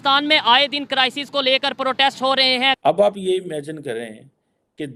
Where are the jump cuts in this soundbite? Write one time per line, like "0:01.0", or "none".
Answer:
0:02.8